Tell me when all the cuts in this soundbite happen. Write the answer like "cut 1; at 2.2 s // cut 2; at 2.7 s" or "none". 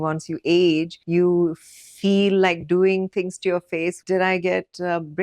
cut 1; at 1.0 s // cut 2; at 4.0 s